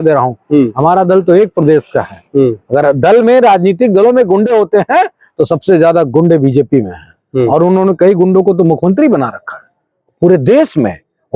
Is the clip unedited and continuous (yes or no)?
yes